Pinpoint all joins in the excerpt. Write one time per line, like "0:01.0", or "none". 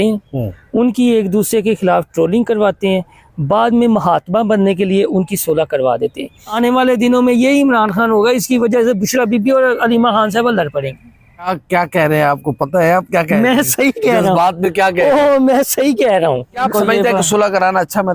0:06.5
0:11.6
0:16.6